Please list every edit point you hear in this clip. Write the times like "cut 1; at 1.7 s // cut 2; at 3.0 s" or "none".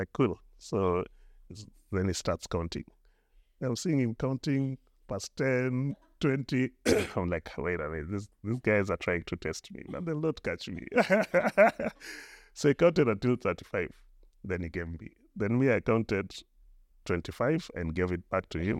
none